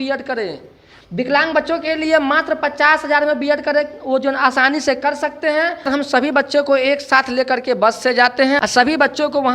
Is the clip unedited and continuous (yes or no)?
no